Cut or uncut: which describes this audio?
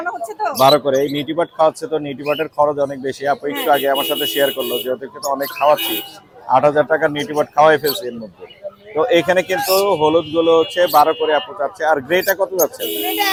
uncut